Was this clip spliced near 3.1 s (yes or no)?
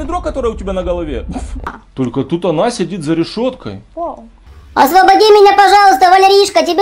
no